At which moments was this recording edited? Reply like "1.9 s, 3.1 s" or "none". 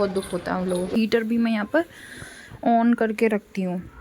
0.9 s